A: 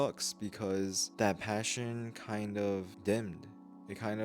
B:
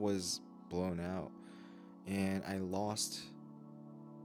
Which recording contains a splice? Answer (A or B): A